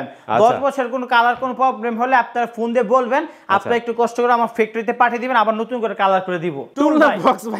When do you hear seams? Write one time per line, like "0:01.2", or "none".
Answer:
0:06.7